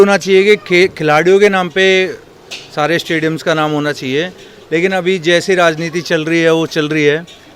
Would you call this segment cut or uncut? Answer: uncut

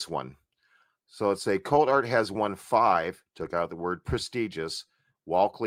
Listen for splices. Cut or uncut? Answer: uncut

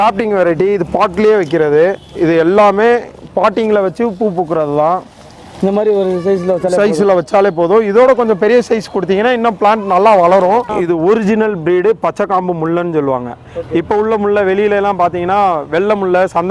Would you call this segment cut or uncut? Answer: cut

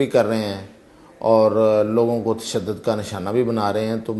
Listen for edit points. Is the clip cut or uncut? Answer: uncut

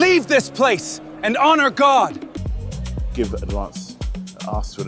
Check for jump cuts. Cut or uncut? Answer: cut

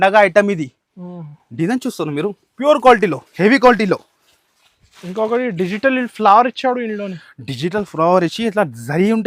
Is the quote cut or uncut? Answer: uncut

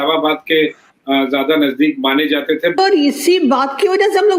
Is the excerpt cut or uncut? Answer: cut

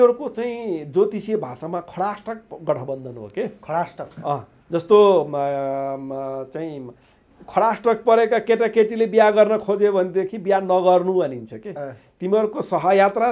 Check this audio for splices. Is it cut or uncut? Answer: uncut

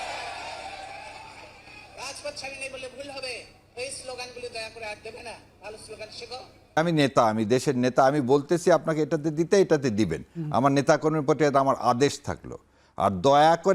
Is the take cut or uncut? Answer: cut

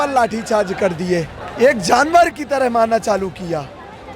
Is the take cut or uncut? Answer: cut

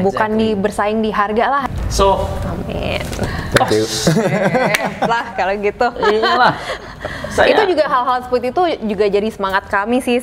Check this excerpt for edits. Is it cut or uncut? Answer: cut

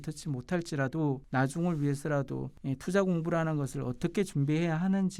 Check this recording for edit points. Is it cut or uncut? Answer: uncut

